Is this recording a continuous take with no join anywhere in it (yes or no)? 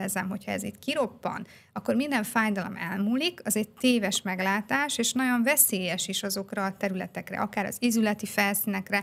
yes